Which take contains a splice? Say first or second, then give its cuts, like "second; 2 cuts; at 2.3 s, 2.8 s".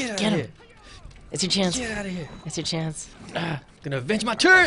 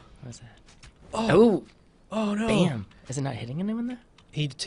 first; 1 cut; at 3.1 s